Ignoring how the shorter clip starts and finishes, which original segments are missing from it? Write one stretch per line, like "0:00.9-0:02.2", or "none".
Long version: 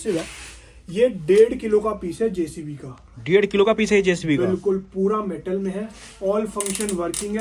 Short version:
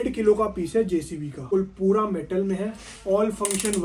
0:02.9-0:04.6